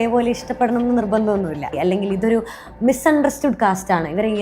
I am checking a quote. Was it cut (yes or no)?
yes